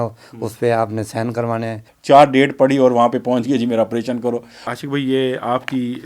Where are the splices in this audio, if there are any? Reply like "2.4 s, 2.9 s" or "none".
1.9 s, 4.7 s